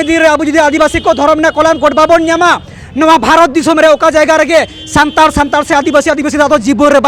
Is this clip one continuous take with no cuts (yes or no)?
yes